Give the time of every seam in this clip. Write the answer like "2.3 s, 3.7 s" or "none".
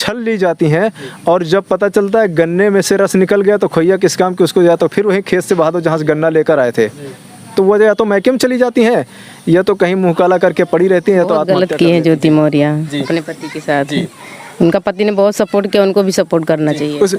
11.4 s

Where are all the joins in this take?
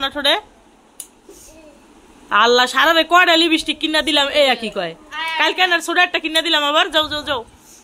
none

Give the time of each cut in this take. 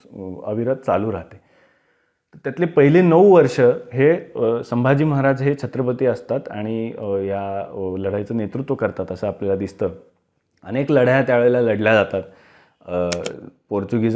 none

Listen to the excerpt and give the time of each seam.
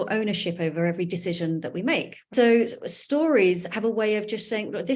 2.3 s

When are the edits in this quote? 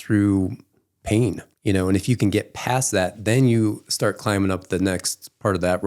1.5 s

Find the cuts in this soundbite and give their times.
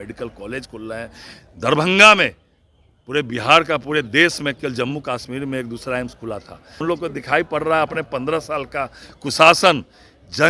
6.8 s

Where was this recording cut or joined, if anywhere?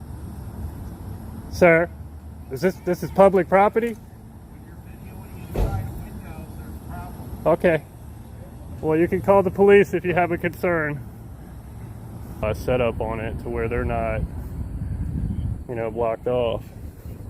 12.4 s

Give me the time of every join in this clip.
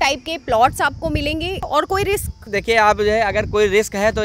1.7 s, 2.4 s

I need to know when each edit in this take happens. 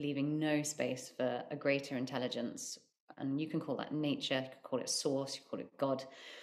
none

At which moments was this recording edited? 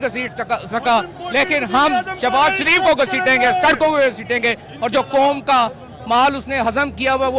none

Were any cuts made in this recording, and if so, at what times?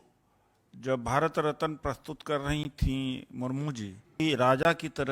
4.2 s

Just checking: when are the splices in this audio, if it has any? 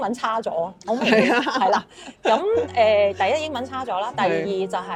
none

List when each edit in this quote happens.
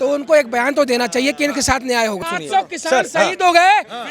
2.4 s

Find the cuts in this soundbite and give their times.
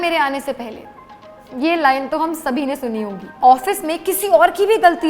3.4 s

